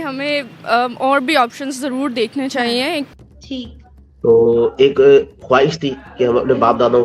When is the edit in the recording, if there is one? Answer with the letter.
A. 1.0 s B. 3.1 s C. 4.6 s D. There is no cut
B